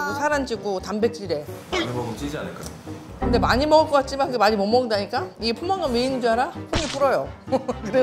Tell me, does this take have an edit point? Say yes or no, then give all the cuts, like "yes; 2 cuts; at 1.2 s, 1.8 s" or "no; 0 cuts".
no; 0 cuts